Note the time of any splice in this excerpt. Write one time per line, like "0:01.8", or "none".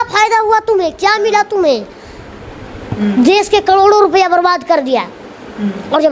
none